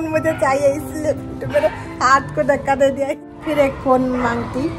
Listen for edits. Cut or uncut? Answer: cut